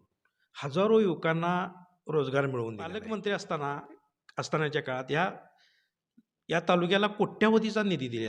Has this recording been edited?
yes; 1 cut; at 3.0 s

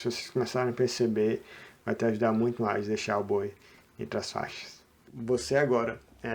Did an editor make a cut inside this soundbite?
yes; 1 cut; at 5.1 s

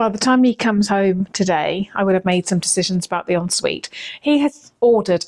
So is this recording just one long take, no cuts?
yes; 0 cuts

